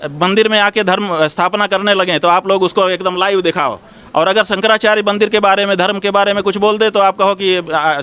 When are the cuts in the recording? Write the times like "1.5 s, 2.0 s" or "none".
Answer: none